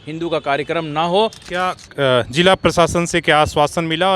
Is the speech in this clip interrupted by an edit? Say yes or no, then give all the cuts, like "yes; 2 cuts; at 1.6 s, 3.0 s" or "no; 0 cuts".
yes; 1 cut; at 1.4 s